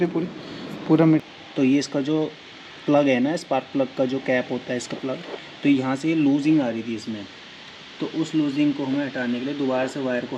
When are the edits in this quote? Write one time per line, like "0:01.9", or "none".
0:01.2